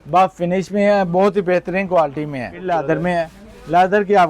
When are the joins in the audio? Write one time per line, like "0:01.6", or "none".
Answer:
0:02.6